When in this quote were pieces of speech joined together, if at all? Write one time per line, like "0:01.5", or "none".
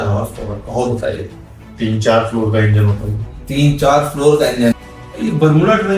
0:04.7